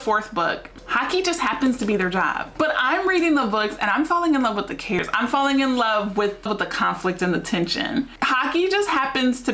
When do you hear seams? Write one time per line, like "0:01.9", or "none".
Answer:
0:02.5
0:05.0
0:06.4
0:08.2